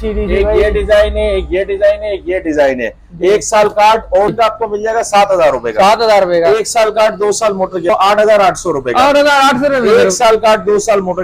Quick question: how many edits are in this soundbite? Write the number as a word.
two